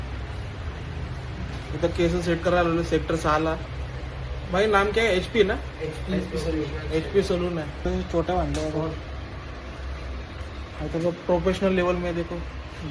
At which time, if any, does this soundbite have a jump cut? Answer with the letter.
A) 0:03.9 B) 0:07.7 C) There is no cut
B